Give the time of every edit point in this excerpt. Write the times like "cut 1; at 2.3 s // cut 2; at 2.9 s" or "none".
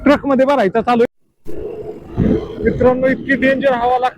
cut 1; at 1.2 s

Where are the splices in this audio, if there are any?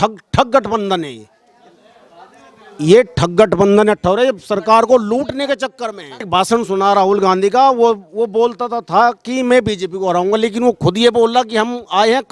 cut 1; at 6.3 s

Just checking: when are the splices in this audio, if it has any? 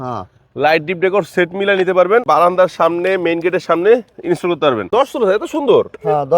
cut 1; at 2.2 s // cut 2; at 4.9 s

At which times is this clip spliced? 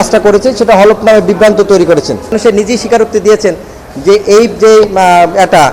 cut 1; at 2.4 s

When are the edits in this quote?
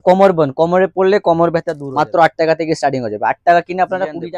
cut 1; at 1.8 s

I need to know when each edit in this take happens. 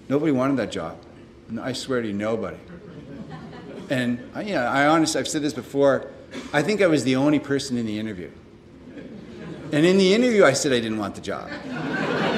none

